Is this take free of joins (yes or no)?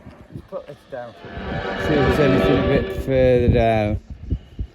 no